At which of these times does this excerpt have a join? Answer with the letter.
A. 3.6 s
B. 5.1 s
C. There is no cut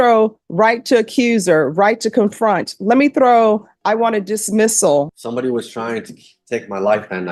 B